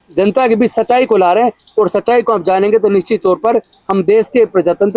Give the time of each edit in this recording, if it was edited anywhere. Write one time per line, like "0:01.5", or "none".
none